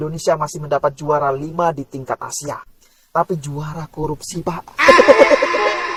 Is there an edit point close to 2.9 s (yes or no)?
no